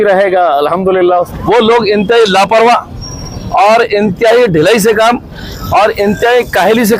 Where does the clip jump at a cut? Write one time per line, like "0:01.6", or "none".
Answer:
0:01.3